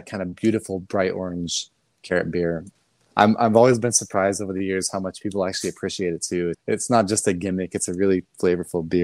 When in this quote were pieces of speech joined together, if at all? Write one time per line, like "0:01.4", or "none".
0:02.7
0:06.6